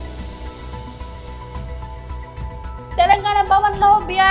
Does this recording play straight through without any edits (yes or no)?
yes